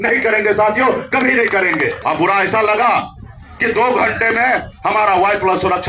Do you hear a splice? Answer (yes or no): yes